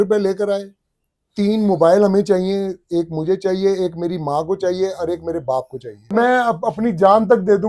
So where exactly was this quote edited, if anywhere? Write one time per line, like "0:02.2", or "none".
0:06.1

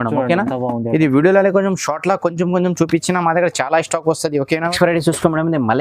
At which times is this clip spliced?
0:04.7

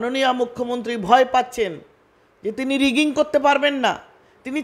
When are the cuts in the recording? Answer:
none

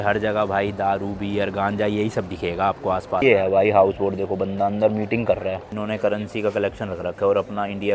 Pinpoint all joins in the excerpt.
0:03.2
0:05.7

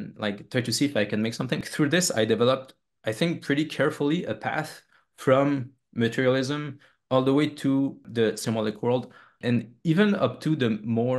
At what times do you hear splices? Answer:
0:01.6
0:08.0
0:09.4

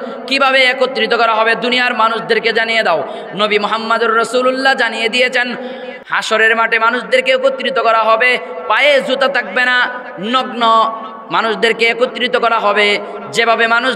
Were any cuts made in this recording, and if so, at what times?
0:05.9

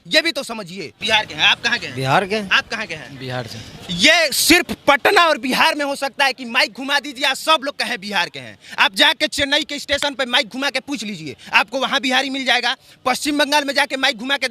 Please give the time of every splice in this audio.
0:00.9

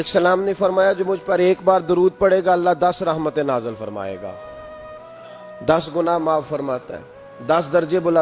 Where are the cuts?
none

